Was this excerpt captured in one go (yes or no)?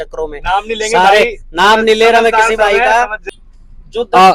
no